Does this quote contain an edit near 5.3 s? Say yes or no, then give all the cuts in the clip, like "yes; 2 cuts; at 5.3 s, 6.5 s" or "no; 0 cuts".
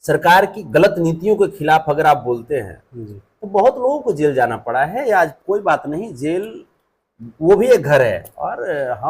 yes; 1 cut; at 5.3 s